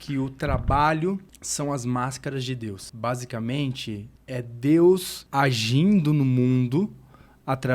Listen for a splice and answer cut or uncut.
cut